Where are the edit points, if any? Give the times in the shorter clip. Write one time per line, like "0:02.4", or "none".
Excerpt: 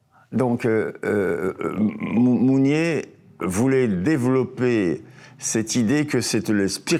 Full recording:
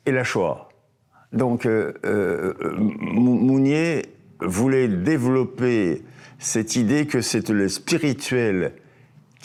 none